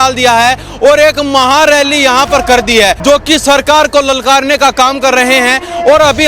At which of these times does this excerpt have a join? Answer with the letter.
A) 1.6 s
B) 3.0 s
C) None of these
B